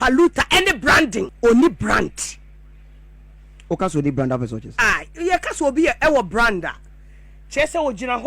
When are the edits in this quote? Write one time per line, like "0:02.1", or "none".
0:01.3